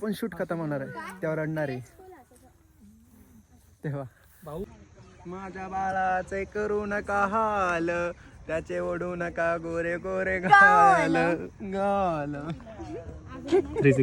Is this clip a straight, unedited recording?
no; 1 cut; at 4.6 s

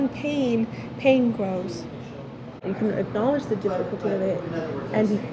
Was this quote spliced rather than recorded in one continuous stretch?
yes; 1 cut; at 2.6 s

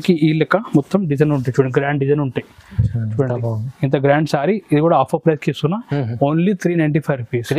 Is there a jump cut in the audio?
no; 0 cuts

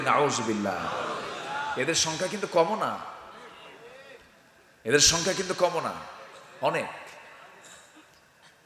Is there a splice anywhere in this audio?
no; 0 cuts

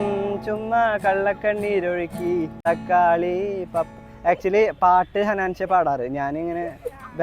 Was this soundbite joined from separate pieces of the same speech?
yes; 1 cut; at 2.4 s

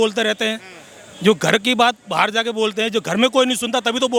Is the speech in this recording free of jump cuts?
yes; 0 cuts

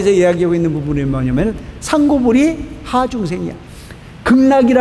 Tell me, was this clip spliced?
yes; 1 cut; at 3.7 s

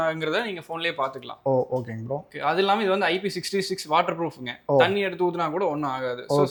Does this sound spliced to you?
no; 0 cuts

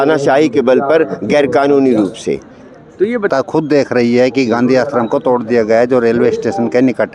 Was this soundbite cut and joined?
yes; 1 cut; at 3.3 s

